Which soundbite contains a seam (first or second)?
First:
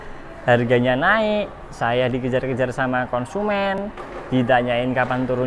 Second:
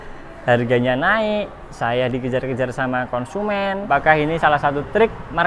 second